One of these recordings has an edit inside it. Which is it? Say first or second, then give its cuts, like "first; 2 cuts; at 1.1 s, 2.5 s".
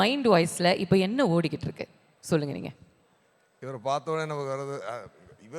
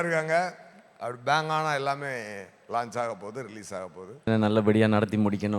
second; 1 cut; at 4.3 s